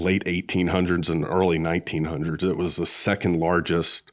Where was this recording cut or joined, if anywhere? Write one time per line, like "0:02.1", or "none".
none